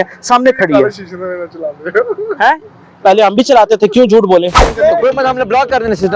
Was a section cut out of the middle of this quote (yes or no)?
yes